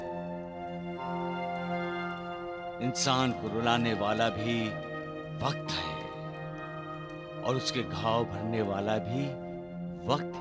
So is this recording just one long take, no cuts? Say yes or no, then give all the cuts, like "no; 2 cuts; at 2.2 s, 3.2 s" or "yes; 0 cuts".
yes; 0 cuts